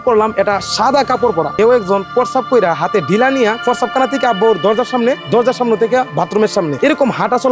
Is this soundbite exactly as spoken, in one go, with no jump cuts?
no; 1 cut; at 1.5 s

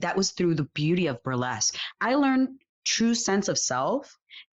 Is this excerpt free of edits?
no; 1 cut; at 1.8 s

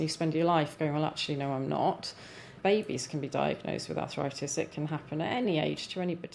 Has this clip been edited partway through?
yes; 2 cuts; at 2.5 s, 5.5 s

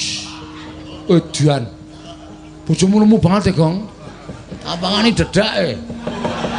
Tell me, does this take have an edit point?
no; 0 cuts

